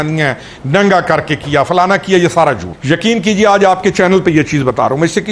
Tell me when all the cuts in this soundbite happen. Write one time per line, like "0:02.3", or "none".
0:02.7